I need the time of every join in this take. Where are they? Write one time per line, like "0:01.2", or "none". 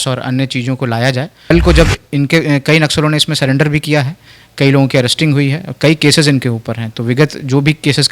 0:01.5

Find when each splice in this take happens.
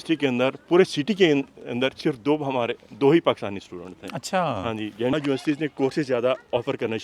0:05.1

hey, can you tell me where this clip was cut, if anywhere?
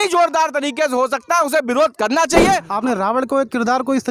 0:02.7

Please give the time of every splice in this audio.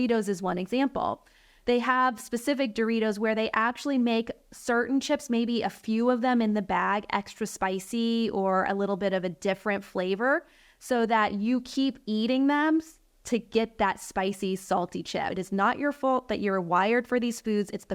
0:15.3

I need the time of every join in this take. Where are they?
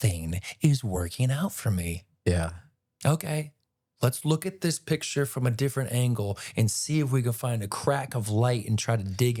none

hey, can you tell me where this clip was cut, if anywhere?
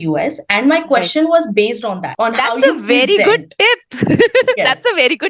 0:02.1

